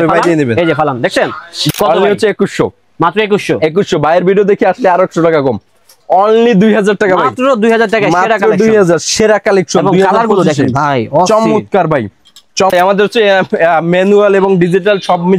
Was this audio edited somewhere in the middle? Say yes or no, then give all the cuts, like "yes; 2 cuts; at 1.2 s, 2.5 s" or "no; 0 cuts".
yes; 2 cuts; at 1.6 s, 12.7 s